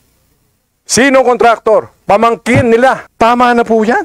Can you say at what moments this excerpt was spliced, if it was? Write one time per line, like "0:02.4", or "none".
0:03.1